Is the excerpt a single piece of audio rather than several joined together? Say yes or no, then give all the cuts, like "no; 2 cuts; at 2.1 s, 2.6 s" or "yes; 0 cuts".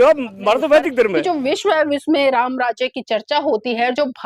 no; 1 cut; at 1.2 s